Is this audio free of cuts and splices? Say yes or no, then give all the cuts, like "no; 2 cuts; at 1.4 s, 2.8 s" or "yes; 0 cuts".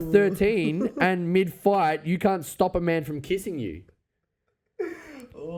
yes; 0 cuts